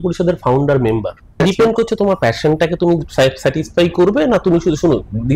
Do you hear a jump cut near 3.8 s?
no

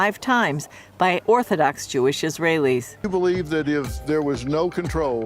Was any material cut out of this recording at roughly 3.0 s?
yes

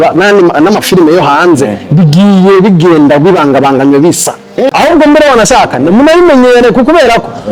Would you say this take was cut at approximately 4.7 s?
yes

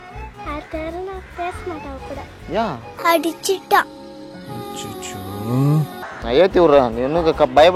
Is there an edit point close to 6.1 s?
yes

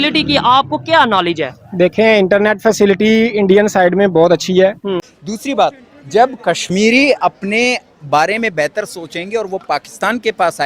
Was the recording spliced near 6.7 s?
no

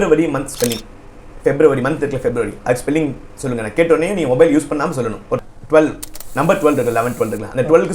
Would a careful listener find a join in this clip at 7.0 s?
no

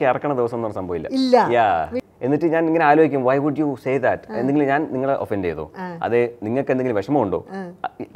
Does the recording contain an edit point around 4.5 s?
no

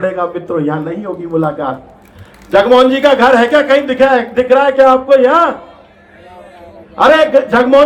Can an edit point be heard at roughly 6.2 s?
no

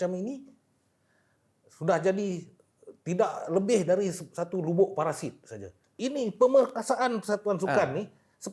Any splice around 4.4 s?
no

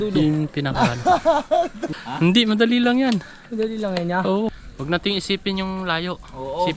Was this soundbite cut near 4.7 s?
yes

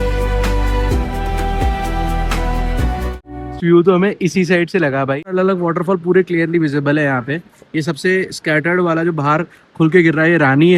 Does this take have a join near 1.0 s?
no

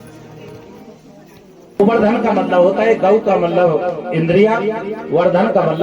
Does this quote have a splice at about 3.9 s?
no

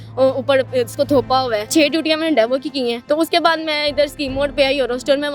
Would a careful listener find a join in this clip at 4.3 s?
no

